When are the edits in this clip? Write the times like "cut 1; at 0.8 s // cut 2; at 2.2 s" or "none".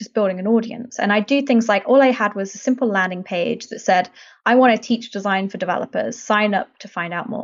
none

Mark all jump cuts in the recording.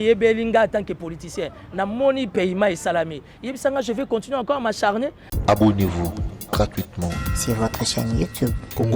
cut 1; at 5.2 s

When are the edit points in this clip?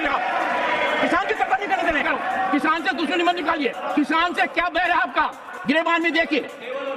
cut 1; at 2.0 s // cut 2; at 3.8 s // cut 3; at 5.5 s

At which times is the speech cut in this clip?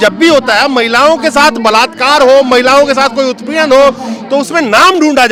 none

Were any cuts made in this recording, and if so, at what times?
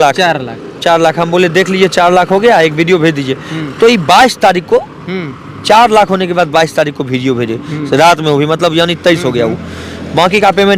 none

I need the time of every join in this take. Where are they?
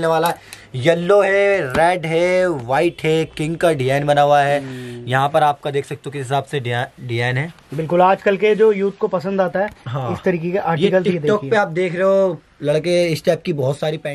none

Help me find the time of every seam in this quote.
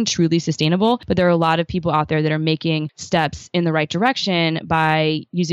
cut 1; at 1.0 s // cut 2; at 2.9 s

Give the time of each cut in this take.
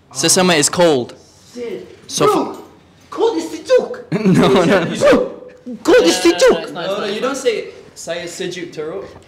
none

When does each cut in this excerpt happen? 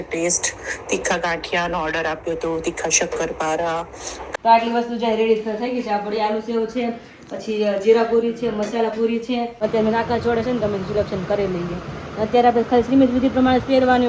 cut 1; at 4.2 s // cut 2; at 9.5 s

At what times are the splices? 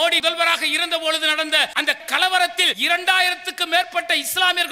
cut 1; at 2.7 s

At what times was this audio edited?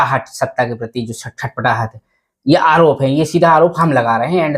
none

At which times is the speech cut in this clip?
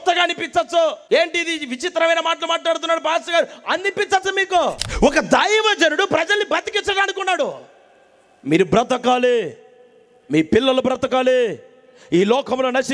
cut 1; at 1.0 s // cut 2; at 4.8 s

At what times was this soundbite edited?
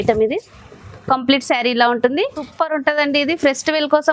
cut 1; at 2.4 s

